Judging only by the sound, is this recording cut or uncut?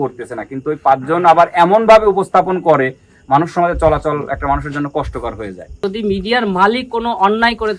cut